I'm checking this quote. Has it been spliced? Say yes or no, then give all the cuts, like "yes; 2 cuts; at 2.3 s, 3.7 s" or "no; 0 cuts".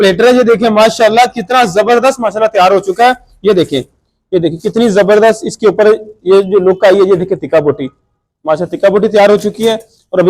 no; 0 cuts